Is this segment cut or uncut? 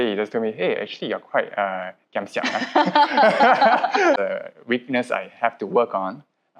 cut